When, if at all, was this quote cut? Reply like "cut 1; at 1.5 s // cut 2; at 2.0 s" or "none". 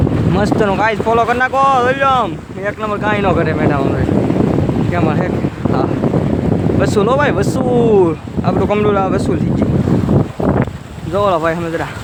none